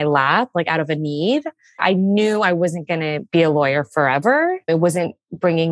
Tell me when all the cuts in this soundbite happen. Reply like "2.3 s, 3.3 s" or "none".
1.8 s, 3.2 s, 4.6 s